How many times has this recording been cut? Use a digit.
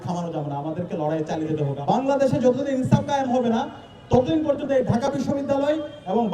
1